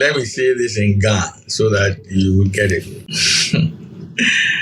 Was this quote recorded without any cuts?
no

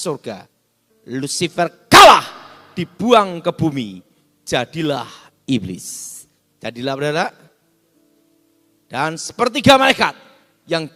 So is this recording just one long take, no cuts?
yes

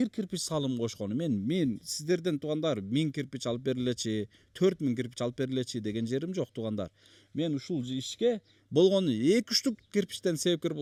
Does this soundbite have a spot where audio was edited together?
no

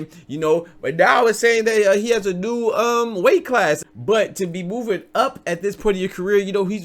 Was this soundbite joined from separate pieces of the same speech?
yes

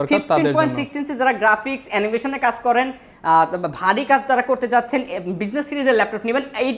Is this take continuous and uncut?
yes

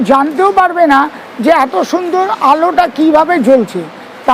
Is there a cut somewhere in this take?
no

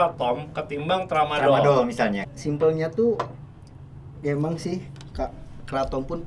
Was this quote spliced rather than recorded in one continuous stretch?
yes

